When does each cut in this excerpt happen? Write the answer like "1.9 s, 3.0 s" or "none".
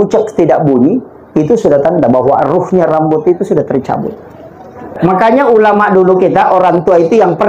4.9 s